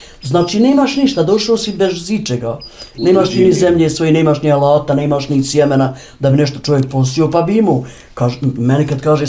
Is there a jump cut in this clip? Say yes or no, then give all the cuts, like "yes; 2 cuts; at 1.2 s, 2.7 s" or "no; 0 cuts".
no; 0 cuts